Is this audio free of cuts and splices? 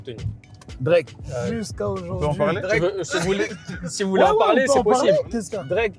no; 1 cut; at 1.2 s

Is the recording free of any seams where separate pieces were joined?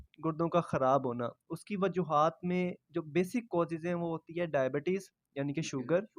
yes; 0 cuts

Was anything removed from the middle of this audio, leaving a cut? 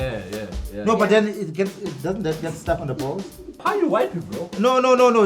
yes; 1 cut; at 3.6 s

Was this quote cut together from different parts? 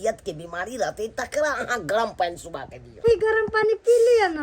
yes; 1 cut; at 3.0 s

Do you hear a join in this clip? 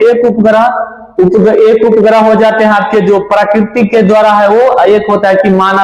no; 0 cuts

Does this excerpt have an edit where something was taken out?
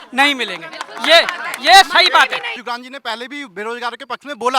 yes; 1 cut; at 2.6 s

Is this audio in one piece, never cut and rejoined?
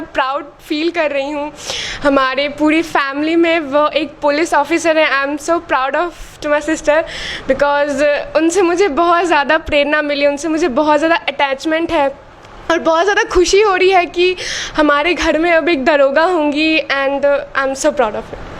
yes; 0 cuts

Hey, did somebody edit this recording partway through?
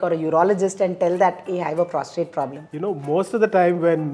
yes; 1 cut; at 2.6 s

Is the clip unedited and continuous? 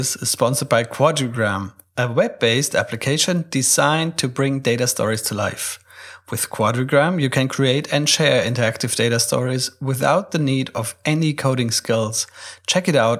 yes; 0 cuts

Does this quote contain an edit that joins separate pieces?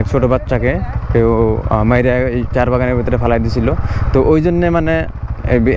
no; 0 cuts

